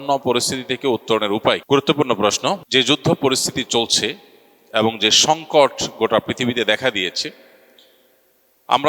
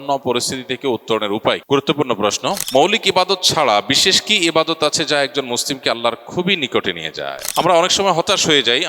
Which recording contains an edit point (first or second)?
second